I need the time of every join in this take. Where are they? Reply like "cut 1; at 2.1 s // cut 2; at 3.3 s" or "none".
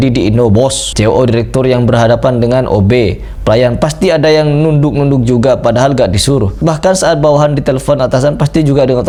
none